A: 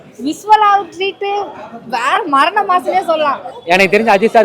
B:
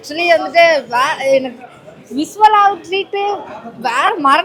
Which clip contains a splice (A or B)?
A